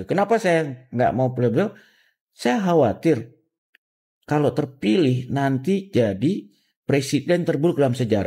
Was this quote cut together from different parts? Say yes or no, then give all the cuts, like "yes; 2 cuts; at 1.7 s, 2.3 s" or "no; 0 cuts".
no; 0 cuts